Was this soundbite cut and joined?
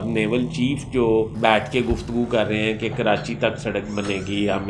yes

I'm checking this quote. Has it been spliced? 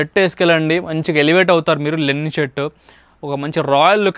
no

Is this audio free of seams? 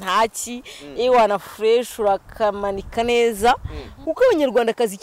no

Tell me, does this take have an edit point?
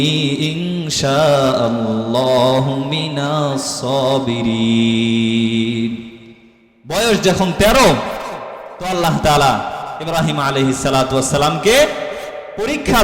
no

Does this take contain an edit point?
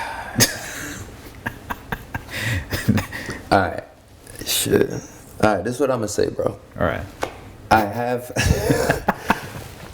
yes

